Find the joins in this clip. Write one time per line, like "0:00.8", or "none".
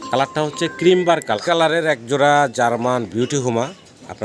0:01.4